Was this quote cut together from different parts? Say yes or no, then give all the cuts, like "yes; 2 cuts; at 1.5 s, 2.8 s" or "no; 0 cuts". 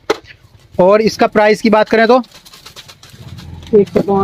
no; 0 cuts